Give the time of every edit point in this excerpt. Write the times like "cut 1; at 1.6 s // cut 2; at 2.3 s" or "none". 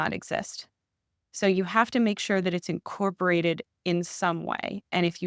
none